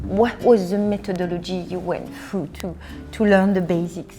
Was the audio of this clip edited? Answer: no; 0 cuts

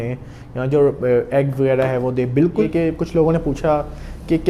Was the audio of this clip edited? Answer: yes; 1 cut; at 2.7 s

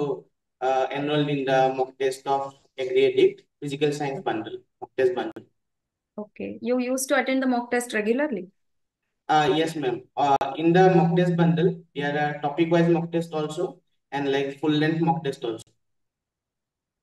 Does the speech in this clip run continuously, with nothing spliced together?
yes; 0 cuts

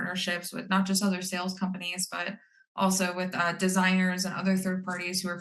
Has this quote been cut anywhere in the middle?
no; 0 cuts

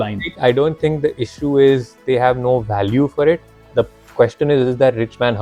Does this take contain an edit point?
no; 0 cuts

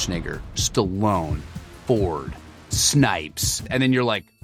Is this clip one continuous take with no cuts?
yes; 0 cuts

